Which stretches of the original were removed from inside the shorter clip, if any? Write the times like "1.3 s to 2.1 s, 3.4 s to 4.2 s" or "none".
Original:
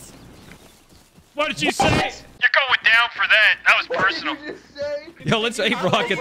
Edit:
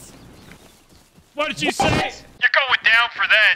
none